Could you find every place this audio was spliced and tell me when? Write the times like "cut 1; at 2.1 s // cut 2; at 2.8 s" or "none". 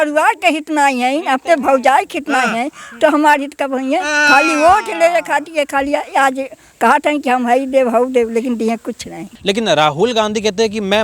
cut 1; at 9.3 s